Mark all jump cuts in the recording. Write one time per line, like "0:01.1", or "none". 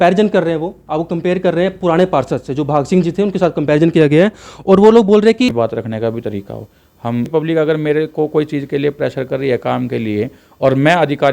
0:05.5
0:07.3